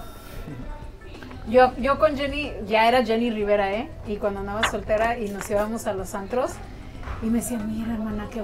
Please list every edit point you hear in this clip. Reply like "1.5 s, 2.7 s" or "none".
none